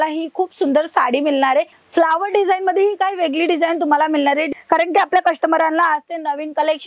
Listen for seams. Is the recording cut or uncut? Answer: cut